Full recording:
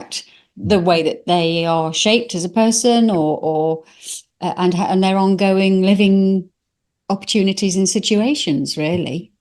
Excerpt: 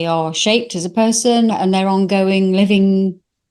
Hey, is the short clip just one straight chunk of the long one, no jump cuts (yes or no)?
no